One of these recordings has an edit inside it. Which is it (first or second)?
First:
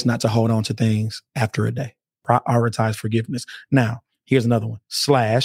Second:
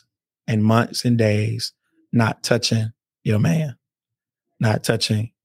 first